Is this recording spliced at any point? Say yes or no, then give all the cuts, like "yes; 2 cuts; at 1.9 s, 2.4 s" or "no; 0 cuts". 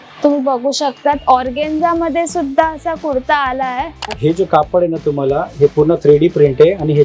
yes; 1 cut; at 4.1 s